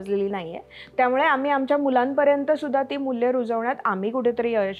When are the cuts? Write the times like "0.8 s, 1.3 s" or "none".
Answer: none